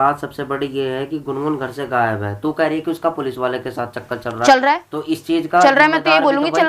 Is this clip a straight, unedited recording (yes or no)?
yes